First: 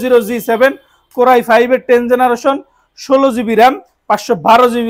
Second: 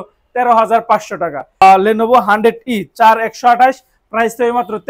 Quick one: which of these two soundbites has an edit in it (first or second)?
second